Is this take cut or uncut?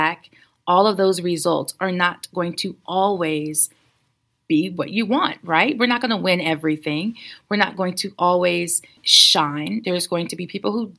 cut